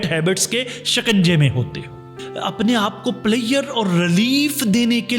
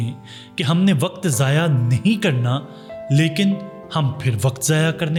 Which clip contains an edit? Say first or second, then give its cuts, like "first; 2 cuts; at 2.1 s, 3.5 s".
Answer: first; 1 cut; at 2.2 s